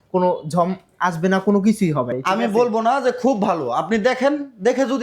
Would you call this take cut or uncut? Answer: cut